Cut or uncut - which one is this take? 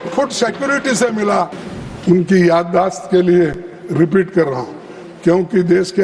cut